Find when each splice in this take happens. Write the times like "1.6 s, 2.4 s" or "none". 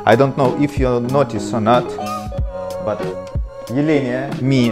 none